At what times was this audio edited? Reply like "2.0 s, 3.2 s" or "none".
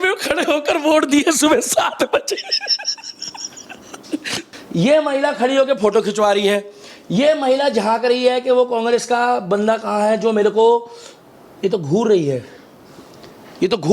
4.4 s